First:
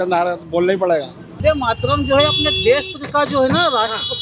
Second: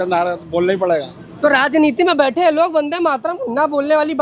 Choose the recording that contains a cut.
first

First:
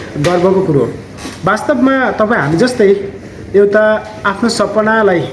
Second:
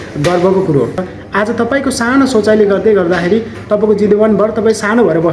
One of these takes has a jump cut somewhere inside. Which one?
second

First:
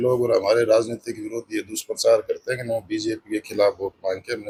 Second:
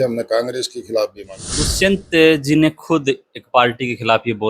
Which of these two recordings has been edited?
second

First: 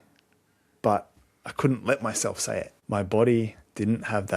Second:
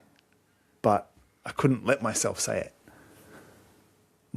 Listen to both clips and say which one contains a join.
first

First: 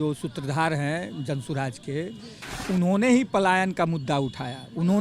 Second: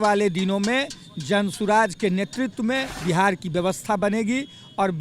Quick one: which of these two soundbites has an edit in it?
second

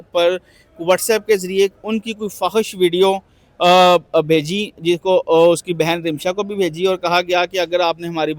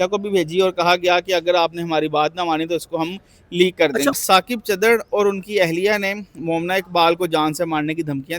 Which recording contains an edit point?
second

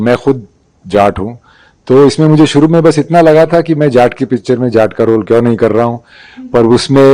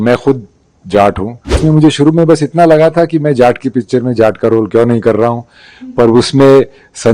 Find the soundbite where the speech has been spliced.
second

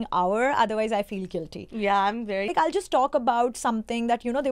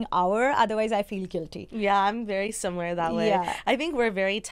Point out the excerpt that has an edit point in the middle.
first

